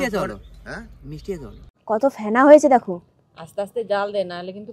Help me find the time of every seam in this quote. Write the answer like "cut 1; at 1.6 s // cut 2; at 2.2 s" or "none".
cut 1; at 1.7 s